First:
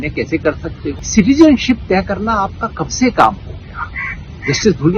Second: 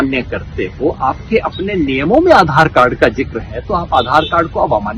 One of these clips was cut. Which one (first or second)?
first